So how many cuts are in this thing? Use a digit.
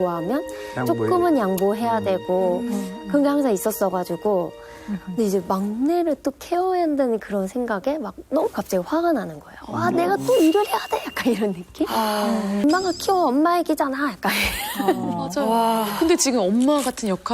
1